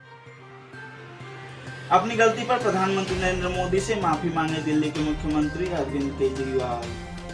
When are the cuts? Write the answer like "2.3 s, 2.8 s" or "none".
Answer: 1.5 s